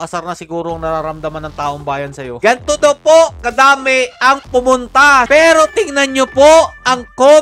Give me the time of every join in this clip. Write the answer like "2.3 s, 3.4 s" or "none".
2.3 s, 5.3 s